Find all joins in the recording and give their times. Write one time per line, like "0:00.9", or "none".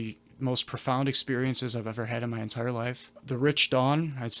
0:03.2